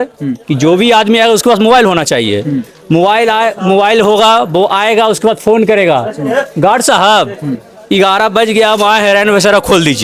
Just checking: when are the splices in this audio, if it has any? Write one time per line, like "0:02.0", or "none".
none